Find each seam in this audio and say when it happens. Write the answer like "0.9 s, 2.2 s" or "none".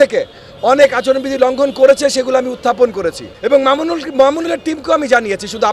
3.3 s